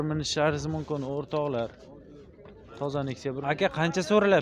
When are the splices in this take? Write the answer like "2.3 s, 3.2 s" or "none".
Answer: 3.4 s